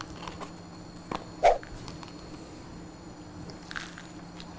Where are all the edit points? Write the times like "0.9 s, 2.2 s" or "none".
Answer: none